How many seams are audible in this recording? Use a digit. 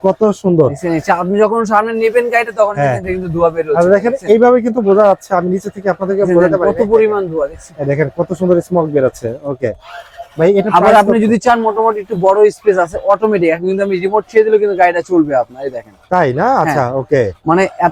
0